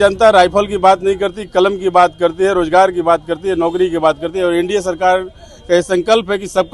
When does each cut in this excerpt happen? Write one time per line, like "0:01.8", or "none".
none